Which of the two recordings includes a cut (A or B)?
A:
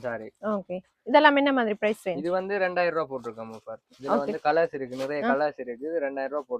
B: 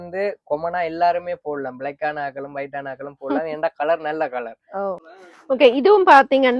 B